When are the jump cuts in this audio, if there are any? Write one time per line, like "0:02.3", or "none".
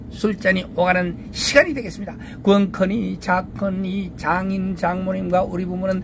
none